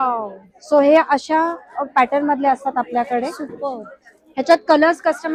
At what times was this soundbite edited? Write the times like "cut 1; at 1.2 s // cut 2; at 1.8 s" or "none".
none